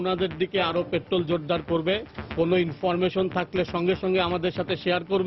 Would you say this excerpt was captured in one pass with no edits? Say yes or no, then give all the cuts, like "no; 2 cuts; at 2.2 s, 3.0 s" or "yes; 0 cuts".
yes; 0 cuts